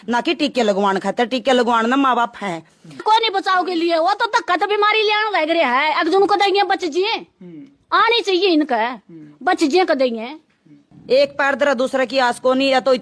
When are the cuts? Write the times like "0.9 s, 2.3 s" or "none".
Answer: 3.0 s, 10.9 s